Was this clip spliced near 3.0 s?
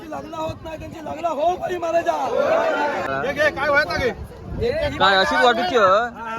yes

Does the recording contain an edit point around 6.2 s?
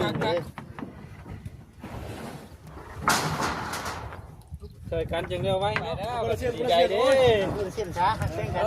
yes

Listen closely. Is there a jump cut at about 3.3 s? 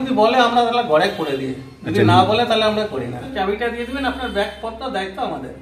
yes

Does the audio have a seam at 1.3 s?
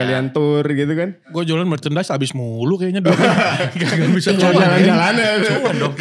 yes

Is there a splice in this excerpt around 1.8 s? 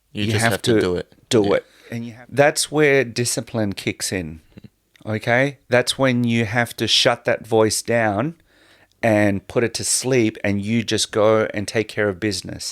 yes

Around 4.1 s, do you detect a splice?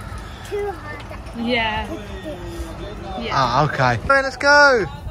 yes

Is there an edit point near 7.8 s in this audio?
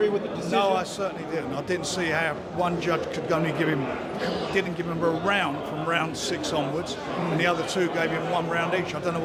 no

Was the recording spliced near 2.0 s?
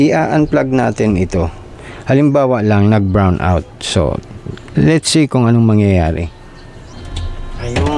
no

